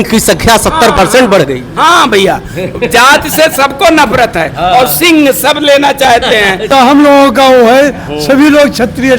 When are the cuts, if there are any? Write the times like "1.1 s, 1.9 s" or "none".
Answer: 6.7 s